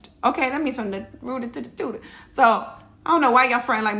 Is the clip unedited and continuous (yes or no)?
yes